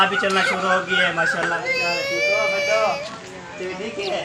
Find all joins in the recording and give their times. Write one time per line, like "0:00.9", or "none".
0:01.6